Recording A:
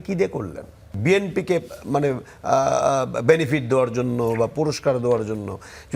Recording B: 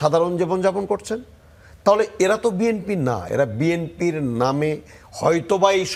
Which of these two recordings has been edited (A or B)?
A